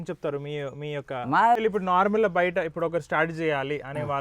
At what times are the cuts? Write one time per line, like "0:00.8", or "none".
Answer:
0:01.6